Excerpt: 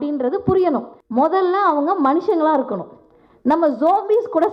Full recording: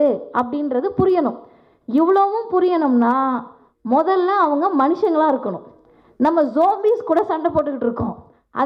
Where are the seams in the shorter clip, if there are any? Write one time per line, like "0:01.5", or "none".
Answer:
0:00.9